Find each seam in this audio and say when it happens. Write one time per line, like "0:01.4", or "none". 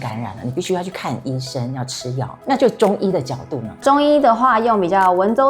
0:02.4
0:03.7